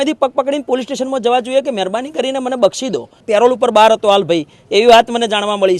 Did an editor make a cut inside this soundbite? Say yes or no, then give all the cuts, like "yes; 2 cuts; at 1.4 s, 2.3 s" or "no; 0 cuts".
yes; 1 cut; at 3.2 s